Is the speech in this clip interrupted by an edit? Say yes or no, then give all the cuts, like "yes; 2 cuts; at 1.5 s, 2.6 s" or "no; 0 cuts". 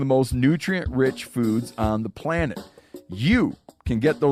no; 0 cuts